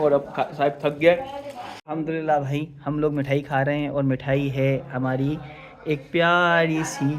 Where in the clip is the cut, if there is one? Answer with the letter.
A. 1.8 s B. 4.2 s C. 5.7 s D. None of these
A